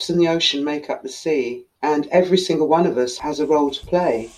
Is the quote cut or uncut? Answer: cut